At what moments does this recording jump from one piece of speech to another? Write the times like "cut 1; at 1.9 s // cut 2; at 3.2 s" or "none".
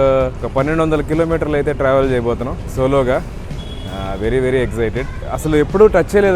none